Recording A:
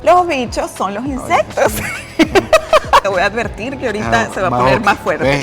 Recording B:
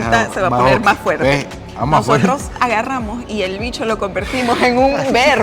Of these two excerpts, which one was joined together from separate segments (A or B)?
A